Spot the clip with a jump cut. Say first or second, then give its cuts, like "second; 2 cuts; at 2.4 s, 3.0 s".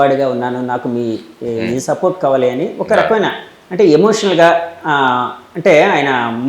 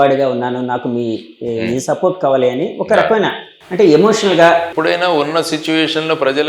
second; 1 cut; at 4.7 s